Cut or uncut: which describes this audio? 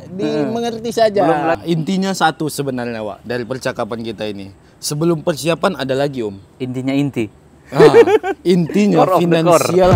cut